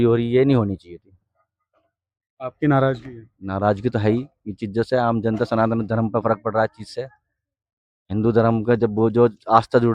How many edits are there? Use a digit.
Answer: 0